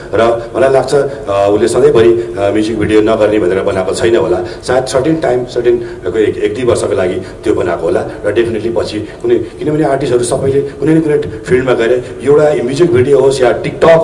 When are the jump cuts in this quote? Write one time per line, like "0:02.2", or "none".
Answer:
none